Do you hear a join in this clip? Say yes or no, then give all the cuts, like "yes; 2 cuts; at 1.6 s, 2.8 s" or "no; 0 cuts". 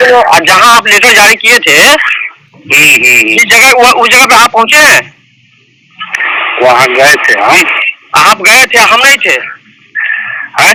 no; 0 cuts